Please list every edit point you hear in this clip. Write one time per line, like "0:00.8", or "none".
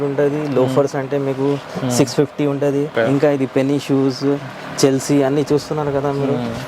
0:02.9